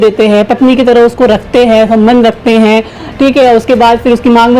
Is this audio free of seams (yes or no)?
yes